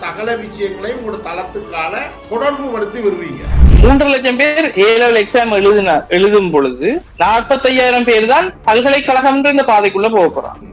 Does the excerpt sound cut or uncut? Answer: cut